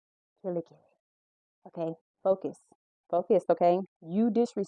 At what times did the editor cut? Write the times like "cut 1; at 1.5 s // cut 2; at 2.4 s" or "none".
cut 1; at 2.1 s // cut 2; at 3.9 s

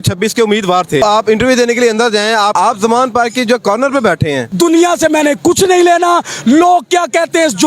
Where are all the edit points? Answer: cut 1; at 1.0 s // cut 2; at 2.5 s // cut 3; at 4.4 s

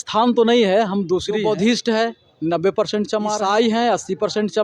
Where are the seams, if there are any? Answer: cut 1; at 1.3 s // cut 2; at 3.4 s

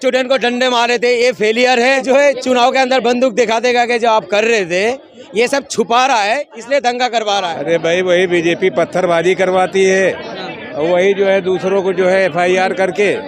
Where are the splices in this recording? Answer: cut 1; at 2.0 s // cut 2; at 7.6 s

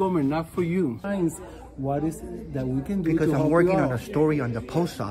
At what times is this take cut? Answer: cut 1; at 0.9 s

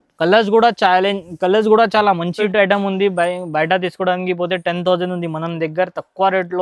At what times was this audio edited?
cut 1; at 2.4 s

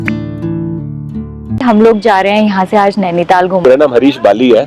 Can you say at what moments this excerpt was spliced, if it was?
cut 1; at 1.6 s // cut 2; at 3.6 s

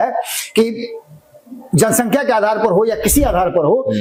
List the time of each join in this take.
none

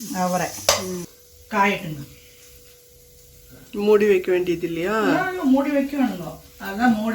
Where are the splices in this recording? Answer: cut 1; at 1.1 s

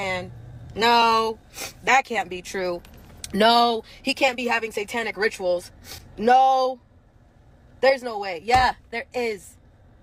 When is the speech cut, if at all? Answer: none

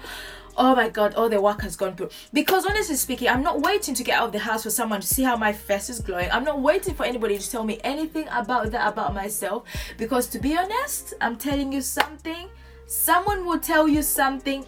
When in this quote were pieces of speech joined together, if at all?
none

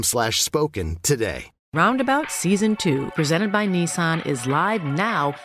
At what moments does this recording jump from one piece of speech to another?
cut 1; at 1.5 s

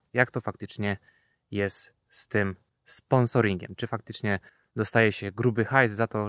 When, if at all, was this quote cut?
none

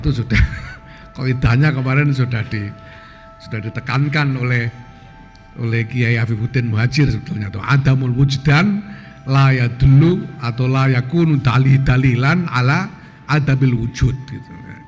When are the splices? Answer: none

